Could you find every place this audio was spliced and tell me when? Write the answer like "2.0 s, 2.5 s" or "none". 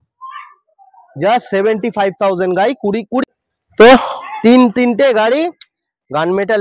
3.2 s